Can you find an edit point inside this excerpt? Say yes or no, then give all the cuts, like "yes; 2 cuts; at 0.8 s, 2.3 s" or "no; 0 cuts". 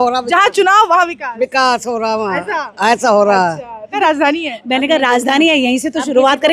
yes; 1 cut; at 3.9 s